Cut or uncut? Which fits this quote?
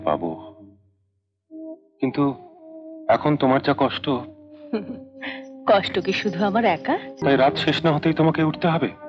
cut